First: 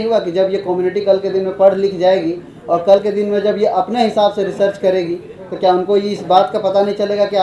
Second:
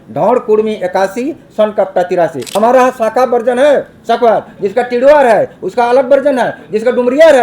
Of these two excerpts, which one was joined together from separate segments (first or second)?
second